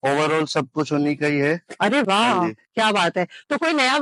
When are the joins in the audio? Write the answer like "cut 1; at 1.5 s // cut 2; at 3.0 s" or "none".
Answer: none